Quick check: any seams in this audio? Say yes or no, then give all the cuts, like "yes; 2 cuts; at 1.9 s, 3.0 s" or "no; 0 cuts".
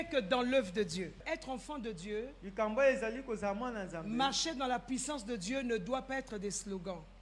yes; 1 cut; at 1.1 s